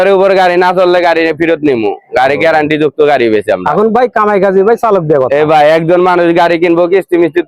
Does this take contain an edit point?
no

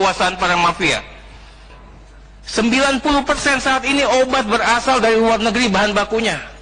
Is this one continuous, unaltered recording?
no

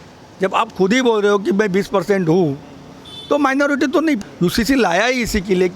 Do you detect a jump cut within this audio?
yes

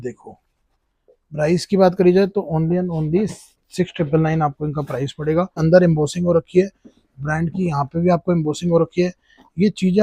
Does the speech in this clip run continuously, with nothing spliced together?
no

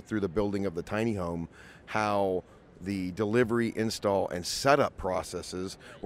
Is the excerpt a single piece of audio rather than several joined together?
yes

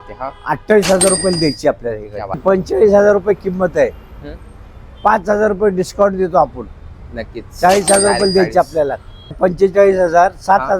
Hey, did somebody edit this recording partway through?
yes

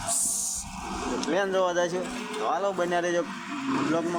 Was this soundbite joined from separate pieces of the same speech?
no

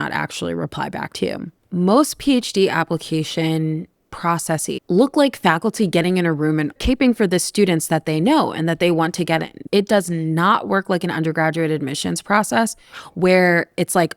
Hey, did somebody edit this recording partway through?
yes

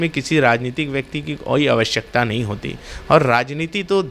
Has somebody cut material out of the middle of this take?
no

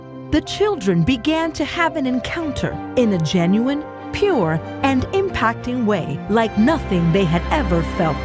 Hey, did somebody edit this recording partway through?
no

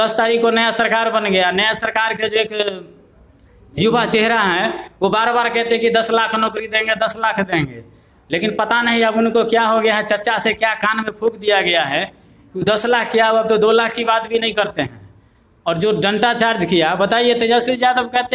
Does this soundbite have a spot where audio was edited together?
no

